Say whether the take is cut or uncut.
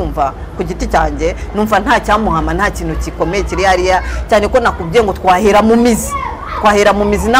uncut